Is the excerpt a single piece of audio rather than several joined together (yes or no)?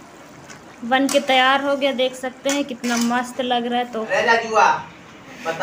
no